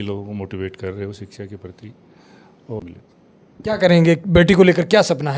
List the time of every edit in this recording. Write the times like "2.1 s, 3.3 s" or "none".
2.8 s